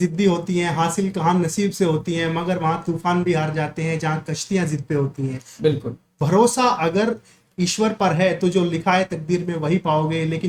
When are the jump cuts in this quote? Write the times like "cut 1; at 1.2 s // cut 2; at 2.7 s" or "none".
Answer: none